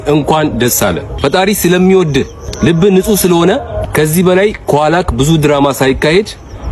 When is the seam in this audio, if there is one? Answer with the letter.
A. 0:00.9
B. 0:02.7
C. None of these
C